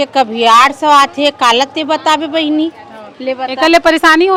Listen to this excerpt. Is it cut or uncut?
uncut